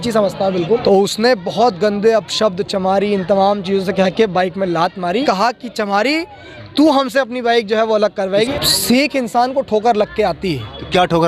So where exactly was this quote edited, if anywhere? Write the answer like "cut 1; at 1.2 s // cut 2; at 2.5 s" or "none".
cut 1; at 0.8 s // cut 2; at 5.2 s // cut 3; at 8.5 s